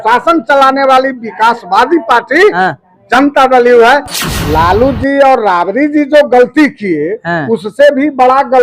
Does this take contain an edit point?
yes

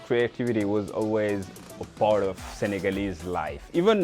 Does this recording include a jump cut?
no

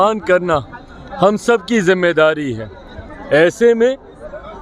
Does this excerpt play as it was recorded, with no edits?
yes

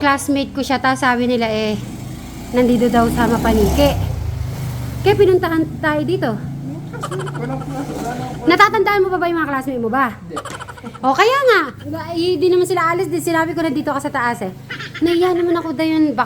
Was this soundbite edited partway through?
yes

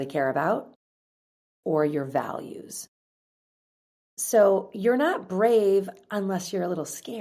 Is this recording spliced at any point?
no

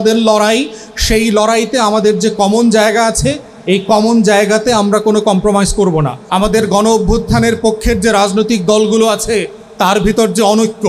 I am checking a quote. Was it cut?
yes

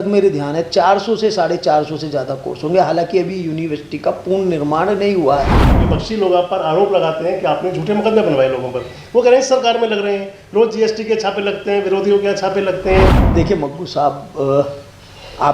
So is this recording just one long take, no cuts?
no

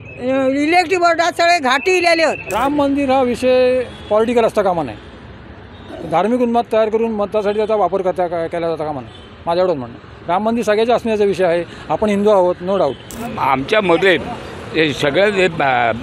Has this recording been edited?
yes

